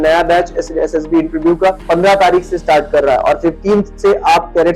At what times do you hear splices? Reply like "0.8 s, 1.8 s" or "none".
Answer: 1.8 s